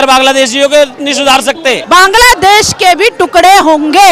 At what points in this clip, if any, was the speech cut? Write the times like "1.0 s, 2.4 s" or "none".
1.7 s